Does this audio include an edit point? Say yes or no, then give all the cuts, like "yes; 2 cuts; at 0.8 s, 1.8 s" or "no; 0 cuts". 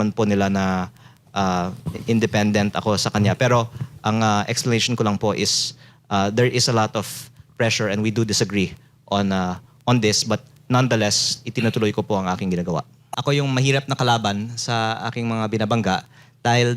yes; 1 cut; at 13.0 s